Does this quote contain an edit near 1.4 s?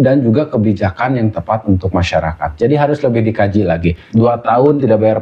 no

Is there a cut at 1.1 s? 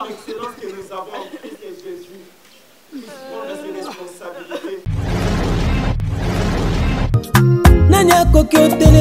no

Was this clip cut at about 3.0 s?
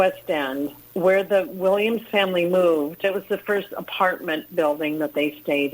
yes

